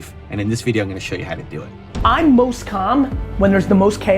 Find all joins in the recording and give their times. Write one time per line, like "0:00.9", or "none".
0:01.8